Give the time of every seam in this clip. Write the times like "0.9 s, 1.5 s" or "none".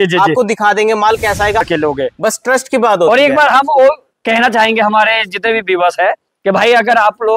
1.6 s